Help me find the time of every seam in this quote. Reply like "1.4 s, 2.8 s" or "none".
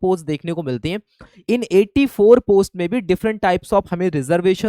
none